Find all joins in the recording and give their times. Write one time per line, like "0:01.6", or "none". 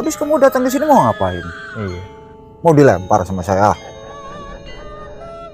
none

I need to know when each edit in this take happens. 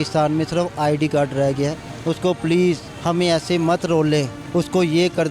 0:01.9
0:02.9
0:04.4

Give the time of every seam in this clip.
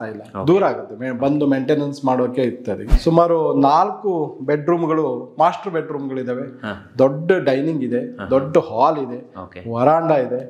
0:02.9

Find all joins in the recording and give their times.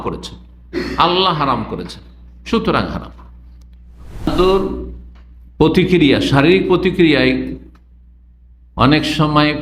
0:04.3

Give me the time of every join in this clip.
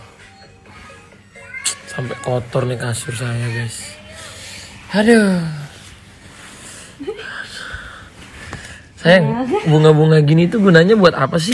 none

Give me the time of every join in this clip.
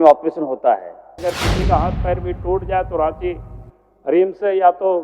0:01.2

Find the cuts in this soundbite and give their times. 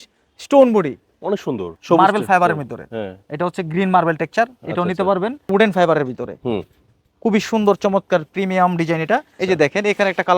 0:01.7
0:05.5
0:09.3

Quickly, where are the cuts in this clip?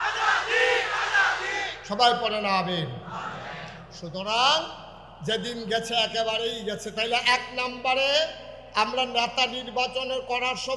none

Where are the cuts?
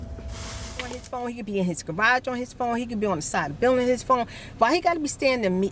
0:01.0

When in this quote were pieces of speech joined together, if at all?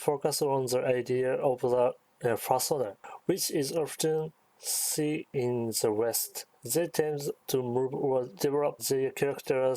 0:05.3
0:06.3
0:07.4
0:08.5

